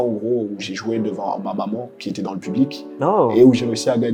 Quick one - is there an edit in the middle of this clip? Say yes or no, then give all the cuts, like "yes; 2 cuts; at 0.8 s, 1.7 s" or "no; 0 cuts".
no; 0 cuts